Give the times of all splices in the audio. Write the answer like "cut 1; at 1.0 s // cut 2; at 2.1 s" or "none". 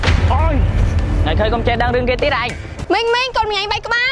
cut 1; at 2.7 s